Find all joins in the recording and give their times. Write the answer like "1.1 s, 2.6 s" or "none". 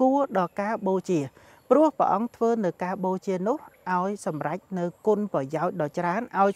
none